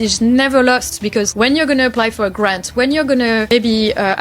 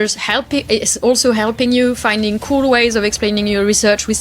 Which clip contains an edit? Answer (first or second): first